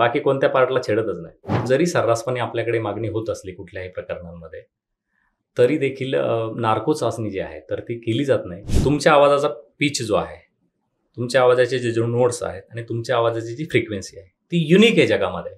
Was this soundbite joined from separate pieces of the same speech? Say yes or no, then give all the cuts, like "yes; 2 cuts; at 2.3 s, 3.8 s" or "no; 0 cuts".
yes; 2 cuts; at 1.6 s, 8.6 s